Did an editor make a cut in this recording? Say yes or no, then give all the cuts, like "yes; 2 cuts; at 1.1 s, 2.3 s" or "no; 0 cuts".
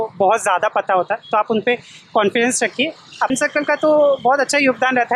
yes; 1 cut; at 3.3 s